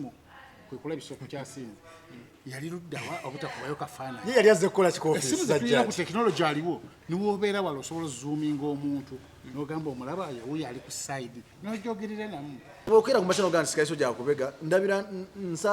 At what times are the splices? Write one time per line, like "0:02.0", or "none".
0:12.9